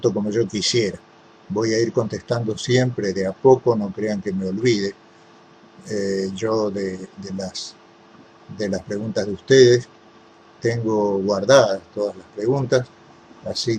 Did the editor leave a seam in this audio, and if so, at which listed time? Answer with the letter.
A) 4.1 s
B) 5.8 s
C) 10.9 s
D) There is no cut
A